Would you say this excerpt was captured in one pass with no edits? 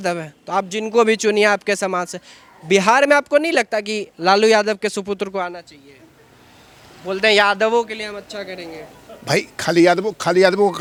yes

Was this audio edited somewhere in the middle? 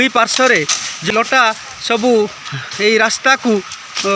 yes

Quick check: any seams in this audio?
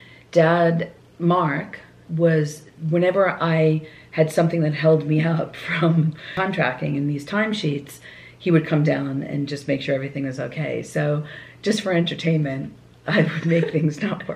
yes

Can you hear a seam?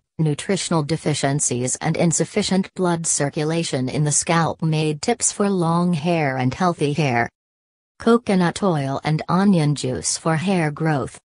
no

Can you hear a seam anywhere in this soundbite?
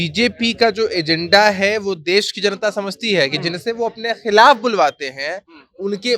no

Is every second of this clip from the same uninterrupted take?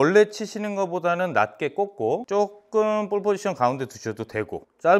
yes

